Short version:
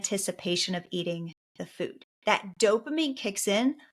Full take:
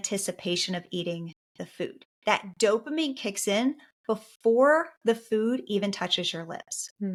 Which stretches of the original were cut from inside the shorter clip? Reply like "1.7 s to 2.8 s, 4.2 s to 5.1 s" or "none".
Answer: none